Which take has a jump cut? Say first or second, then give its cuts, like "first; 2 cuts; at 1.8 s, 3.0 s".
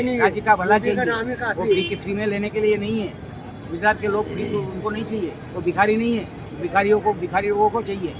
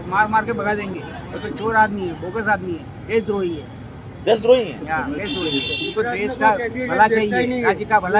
second; 1 cut; at 5.8 s